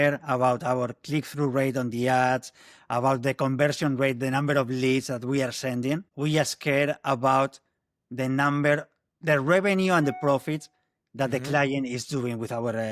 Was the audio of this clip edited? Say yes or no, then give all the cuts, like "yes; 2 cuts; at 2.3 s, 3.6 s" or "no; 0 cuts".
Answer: yes; 1 cut; at 6.1 s